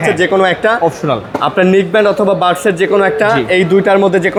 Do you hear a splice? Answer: no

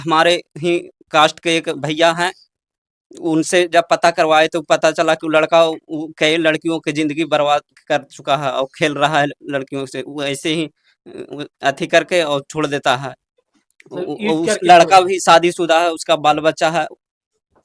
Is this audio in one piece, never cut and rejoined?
yes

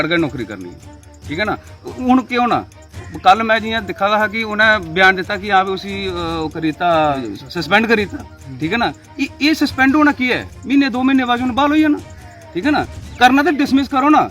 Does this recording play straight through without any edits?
no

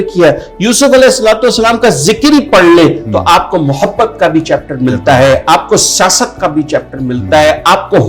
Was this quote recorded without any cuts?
yes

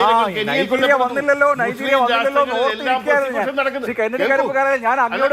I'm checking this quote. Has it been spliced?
no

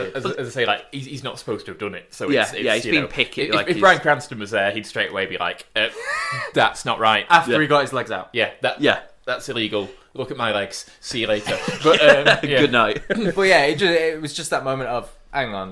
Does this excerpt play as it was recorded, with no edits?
yes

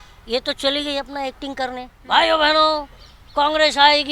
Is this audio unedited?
no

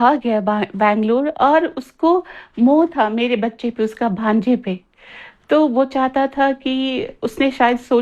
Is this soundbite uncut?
yes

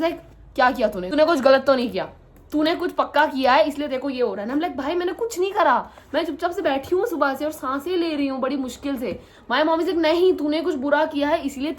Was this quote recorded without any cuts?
no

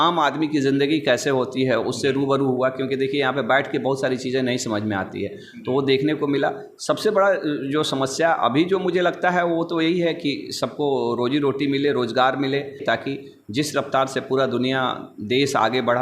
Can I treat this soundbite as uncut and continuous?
no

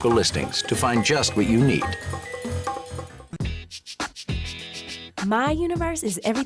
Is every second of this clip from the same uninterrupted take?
no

